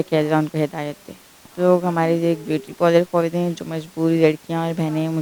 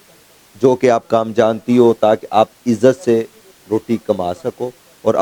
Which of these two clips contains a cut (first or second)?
first